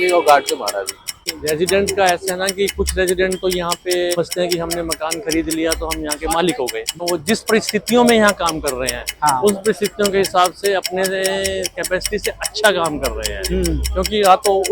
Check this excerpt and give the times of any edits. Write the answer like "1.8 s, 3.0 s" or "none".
1.4 s, 4.2 s, 7.0 s